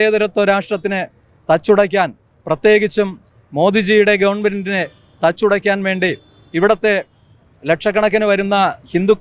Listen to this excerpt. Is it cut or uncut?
uncut